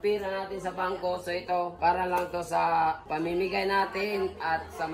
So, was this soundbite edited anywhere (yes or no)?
yes